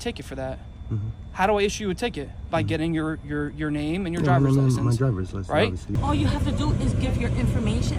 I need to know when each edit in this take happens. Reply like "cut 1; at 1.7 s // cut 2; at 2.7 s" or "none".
cut 1; at 5.9 s